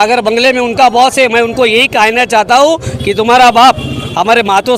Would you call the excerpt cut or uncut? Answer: uncut